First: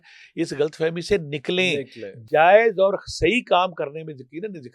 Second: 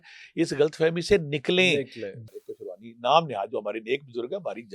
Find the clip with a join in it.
second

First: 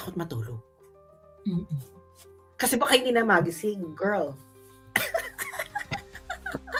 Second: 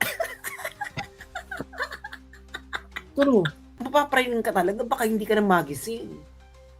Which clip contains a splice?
second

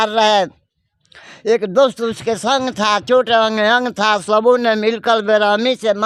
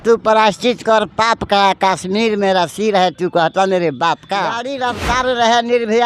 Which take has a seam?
second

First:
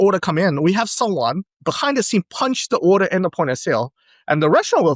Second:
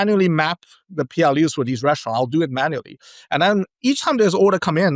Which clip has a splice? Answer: first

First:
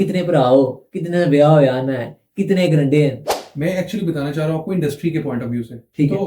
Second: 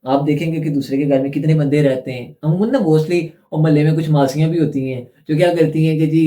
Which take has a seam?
first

